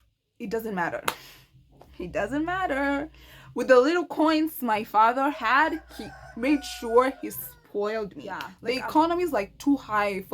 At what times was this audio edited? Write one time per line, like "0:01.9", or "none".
0:08.5